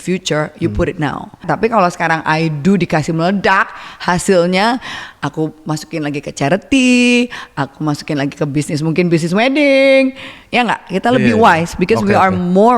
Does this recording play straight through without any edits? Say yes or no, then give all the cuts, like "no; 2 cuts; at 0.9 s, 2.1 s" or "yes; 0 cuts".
no; 1 cut; at 1.4 s